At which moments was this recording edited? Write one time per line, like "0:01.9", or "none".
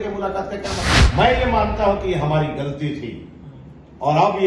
0:00.9